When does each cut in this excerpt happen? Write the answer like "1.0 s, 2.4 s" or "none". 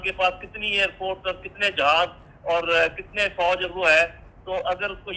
none

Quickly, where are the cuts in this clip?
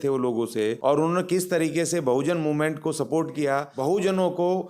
0.8 s, 3.7 s

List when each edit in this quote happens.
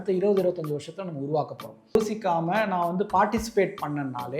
2.0 s

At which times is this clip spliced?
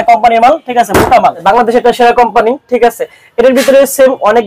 1.4 s

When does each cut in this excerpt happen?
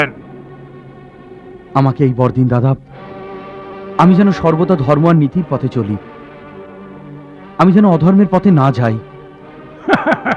none

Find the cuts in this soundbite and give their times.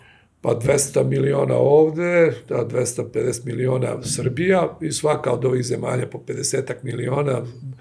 none

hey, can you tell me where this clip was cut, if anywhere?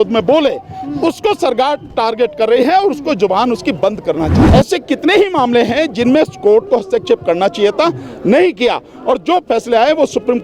4.4 s

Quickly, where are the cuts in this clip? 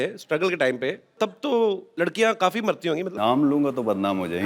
1.2 s, 1.9 s, 3.1 s

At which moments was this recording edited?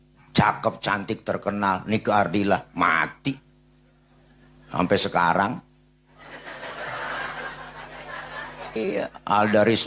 8.8 s

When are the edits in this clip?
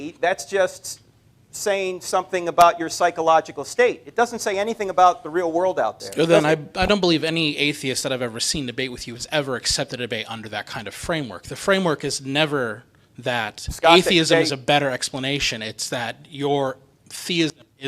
6.0 s

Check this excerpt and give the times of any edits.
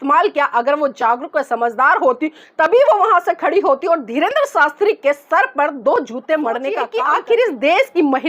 6.9 s

